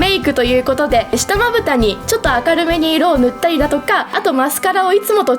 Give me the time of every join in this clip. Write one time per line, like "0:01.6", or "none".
0:01.1
0:02.0
0:04.1